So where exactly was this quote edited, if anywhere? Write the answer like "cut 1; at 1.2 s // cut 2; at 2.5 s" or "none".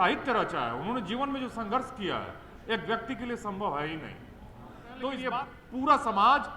cut 1; at 5.2 s